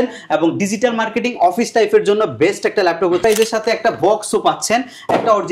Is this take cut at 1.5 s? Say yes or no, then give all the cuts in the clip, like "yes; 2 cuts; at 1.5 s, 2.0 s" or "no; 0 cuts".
no; 1 cut; at 3.2 s